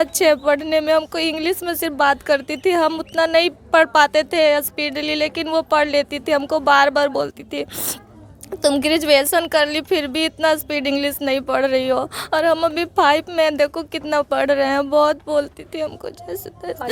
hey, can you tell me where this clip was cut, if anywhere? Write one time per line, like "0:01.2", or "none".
none